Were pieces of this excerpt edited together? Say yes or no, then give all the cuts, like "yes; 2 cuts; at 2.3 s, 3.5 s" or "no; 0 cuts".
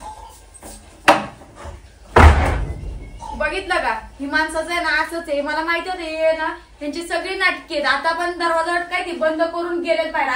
no; 0 cuts